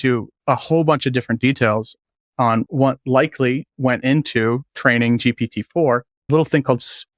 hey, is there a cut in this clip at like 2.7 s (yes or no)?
yes